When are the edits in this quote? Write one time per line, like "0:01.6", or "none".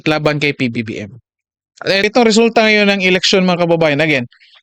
0:02.0